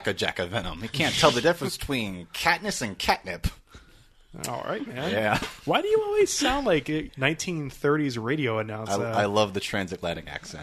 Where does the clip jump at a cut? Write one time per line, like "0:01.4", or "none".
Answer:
0:07.1